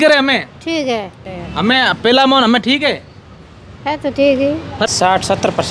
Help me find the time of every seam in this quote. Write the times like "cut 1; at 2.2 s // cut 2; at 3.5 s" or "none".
cut 1; at 1.2 s // cut 2; at 4.9 s